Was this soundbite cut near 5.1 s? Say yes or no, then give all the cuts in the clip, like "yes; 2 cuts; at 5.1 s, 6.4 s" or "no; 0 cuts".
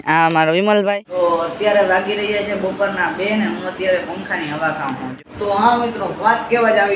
yes; 2 cuts; at 1.0 s, 5.1 s